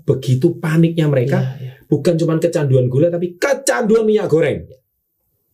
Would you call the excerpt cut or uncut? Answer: uncut